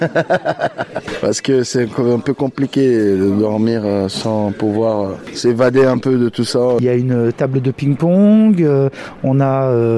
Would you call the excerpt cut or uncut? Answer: cut